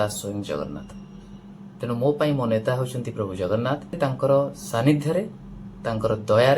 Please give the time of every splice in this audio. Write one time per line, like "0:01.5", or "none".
0:04.0